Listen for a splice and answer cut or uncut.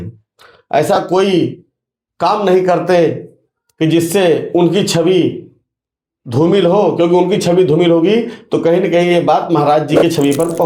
uncut